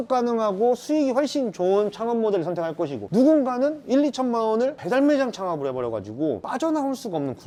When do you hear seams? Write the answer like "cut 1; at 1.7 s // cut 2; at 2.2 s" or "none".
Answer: none

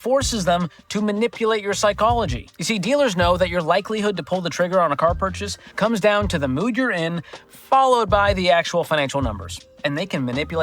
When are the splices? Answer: cut 1; at 4.0 s

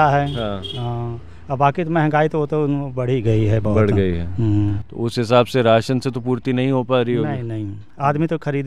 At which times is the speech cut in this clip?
none

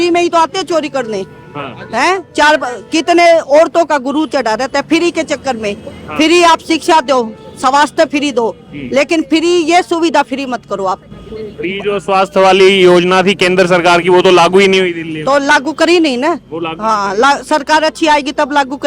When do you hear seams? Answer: none

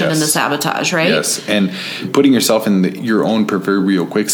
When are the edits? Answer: cut 1; at 3.0 s

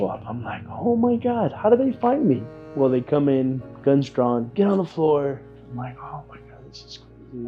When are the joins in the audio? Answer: none

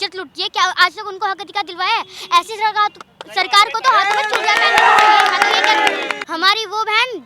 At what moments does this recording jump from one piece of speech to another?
cut 1; at 6.2 s

